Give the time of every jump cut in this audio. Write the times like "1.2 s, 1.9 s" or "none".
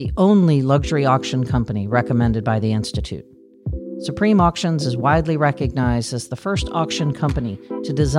none